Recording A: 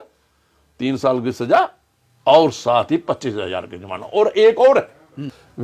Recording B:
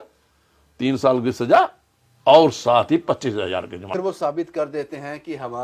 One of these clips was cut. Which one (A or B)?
B